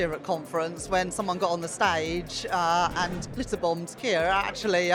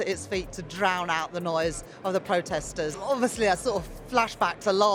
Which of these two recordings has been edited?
second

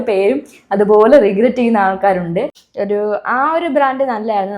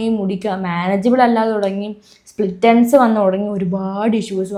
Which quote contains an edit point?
first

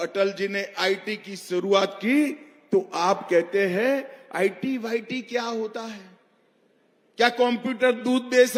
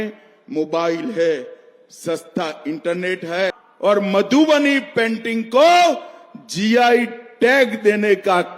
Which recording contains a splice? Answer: second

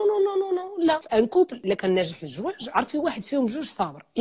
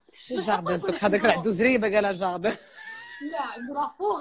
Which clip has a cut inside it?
first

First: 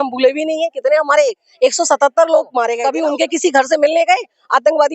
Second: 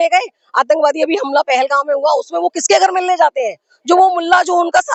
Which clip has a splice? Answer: first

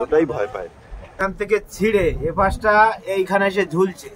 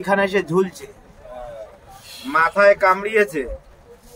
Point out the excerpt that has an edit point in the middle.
first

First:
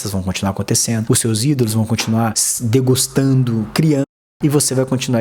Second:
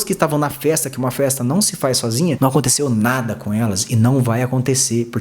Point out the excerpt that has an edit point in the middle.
second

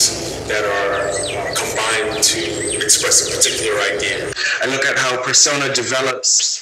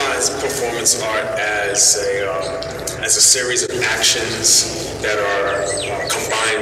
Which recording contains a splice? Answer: first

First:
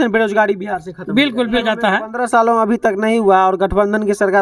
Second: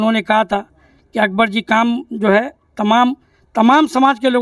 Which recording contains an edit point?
first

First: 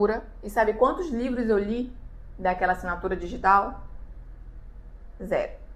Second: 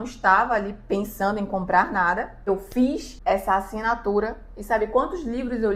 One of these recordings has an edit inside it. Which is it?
second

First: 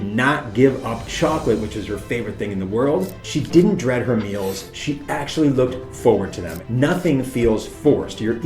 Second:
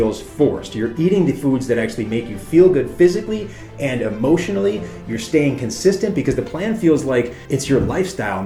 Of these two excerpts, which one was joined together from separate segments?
first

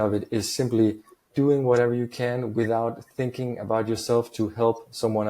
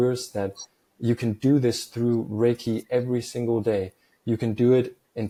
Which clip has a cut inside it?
first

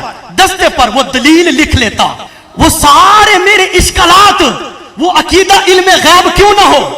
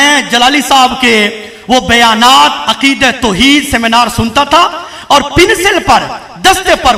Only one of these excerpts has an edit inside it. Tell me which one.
first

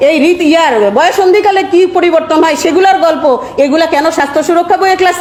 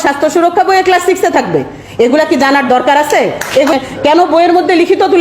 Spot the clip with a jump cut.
second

